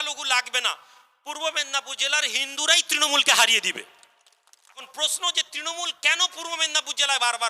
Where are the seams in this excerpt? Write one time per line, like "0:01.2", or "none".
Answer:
0:04.9

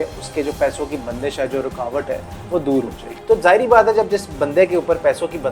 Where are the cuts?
0:03.1

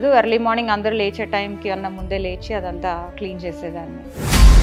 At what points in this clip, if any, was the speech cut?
none

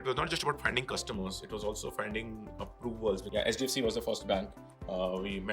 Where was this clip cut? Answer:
0:03.2

